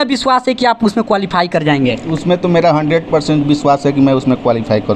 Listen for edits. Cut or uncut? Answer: uncut